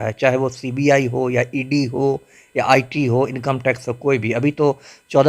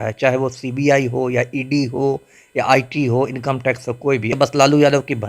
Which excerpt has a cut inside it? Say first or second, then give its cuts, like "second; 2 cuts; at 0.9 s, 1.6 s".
second; 1 cut; at 4.4 s